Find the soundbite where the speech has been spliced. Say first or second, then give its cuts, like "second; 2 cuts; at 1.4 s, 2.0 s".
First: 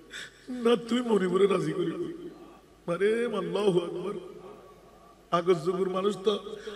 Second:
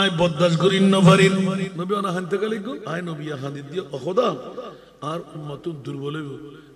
second; 2 cuts; at 1.7 s, 2.8 s